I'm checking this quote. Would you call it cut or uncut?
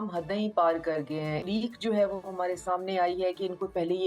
cut